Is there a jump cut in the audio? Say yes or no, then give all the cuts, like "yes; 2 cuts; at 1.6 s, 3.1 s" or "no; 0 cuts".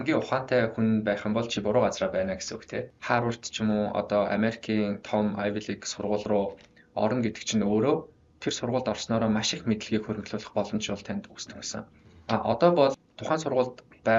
yes; 2 cuts; at 2.8 s, 13.1 s